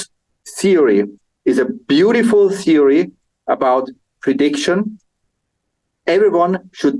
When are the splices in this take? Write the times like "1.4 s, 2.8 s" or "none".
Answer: none